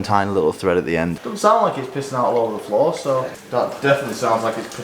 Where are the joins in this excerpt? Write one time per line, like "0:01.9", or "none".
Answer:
0:01.1
0:03.4

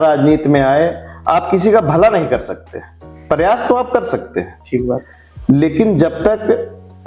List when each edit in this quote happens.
none

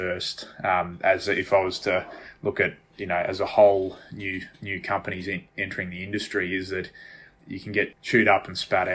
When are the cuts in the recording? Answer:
0:07.5

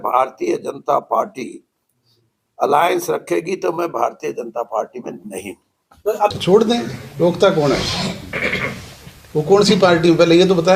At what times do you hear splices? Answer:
0:06.4

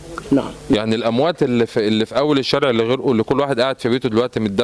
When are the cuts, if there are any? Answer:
none

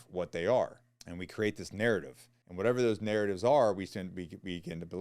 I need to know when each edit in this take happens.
none

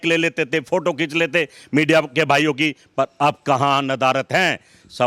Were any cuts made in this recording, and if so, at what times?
none

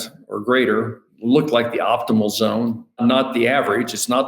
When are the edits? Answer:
0:01.0
0:03.0

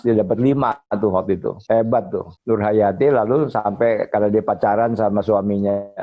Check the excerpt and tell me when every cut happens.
0:01.5
0:02.3

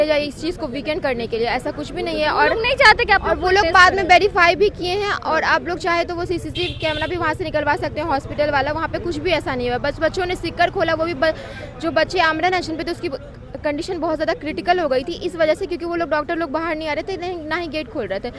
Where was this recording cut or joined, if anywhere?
none

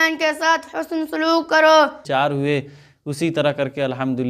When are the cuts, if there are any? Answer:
0:02.0

